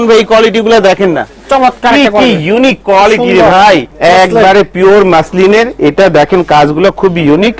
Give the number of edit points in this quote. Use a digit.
1